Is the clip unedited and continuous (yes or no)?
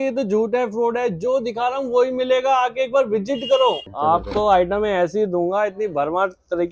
no